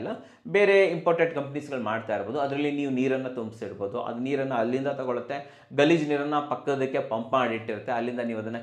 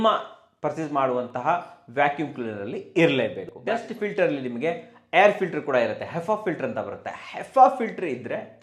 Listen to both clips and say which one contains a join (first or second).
second